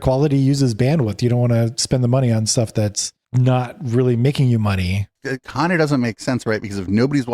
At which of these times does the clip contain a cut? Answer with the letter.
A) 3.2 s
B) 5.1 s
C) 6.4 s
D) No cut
B